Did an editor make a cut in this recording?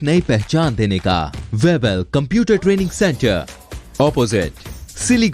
yes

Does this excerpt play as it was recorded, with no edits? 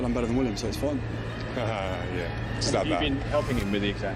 yes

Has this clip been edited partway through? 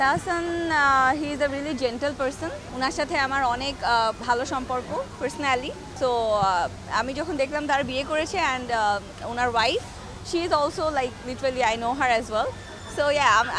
yes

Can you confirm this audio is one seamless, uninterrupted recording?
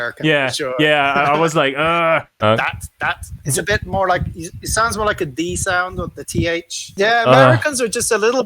no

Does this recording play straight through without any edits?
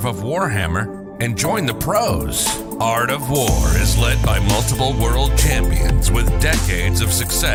yes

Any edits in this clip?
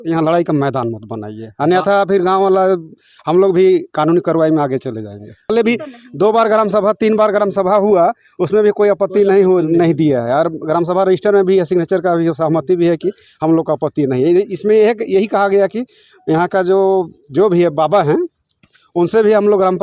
yes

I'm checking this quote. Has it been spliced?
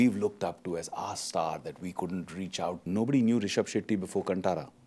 yes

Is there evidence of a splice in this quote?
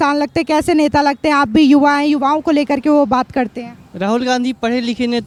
no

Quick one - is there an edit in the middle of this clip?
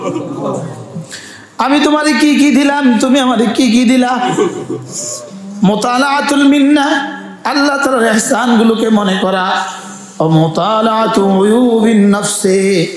no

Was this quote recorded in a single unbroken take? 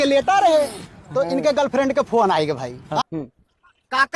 no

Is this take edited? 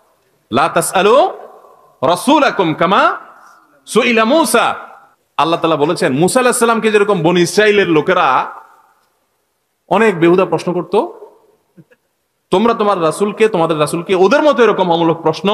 no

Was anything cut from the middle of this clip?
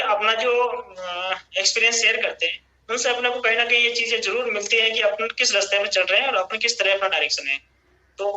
no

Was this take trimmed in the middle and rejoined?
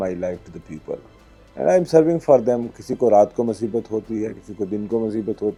no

